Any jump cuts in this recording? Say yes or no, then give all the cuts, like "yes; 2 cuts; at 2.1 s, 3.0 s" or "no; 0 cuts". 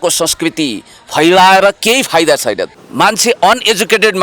yes; 1 cut; at 2.7 s